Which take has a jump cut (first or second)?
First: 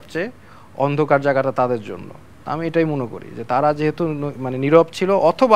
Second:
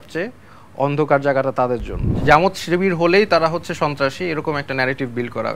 second